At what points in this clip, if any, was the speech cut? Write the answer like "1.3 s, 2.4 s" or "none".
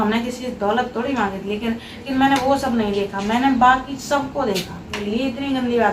2.0 s, 5.0 s